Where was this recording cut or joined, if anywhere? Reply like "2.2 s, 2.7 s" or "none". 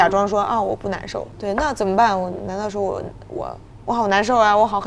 none